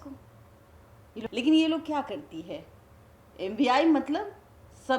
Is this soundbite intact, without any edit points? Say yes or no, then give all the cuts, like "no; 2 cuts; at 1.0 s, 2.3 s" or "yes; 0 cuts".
no; 1 cut; at 1.2 s